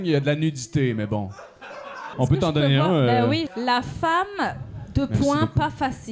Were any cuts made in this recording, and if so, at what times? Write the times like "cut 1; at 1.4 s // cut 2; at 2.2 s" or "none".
cut 1; at 2.1 s // cut 2; at 3.5 s